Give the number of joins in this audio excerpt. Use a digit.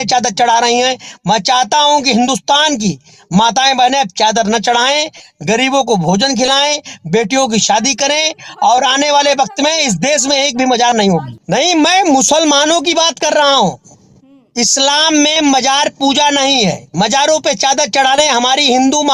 1